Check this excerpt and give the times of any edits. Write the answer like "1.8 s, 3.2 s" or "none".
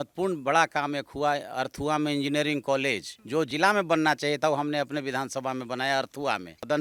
none